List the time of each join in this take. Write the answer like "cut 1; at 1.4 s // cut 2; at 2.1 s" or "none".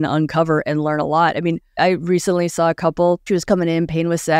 cut 1; at 1.7 s // cut 2; at 3.2 s